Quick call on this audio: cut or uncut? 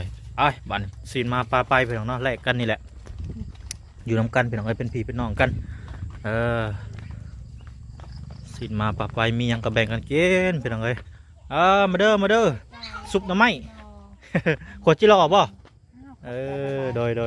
uncut